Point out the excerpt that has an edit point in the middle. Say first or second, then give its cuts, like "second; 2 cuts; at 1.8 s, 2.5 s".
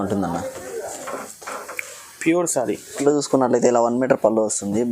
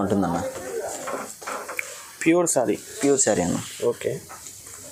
first; 1 cut; at 3.0 s